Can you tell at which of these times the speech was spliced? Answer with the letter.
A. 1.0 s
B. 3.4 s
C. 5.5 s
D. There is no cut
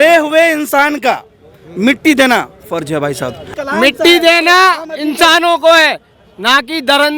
B